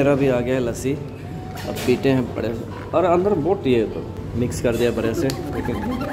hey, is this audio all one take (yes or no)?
no